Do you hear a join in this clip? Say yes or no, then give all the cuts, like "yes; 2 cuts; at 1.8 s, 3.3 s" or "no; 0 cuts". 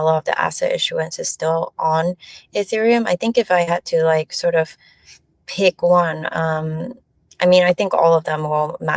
no; 0 cuts